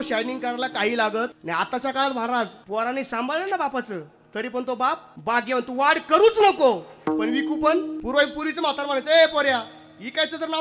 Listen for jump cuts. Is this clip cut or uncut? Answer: cut